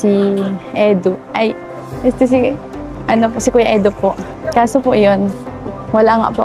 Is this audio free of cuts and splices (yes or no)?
no